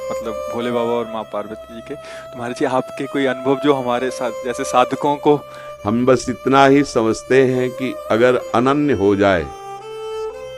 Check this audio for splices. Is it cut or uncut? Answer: uncut